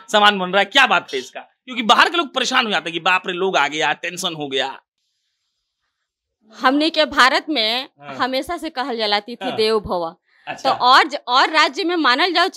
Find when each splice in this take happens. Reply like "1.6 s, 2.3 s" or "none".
none